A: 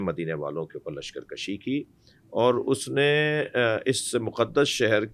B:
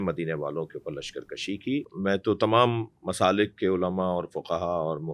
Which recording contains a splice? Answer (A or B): B